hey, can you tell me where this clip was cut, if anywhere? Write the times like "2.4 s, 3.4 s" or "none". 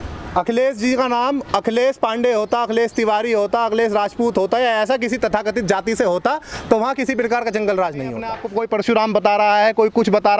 8.4 s